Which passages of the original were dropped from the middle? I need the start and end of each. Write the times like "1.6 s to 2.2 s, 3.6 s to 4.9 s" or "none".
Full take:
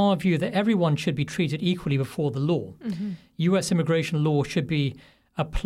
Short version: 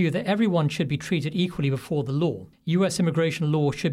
2.8 s to 3.2 s